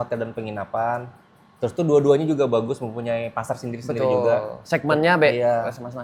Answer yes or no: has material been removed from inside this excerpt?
no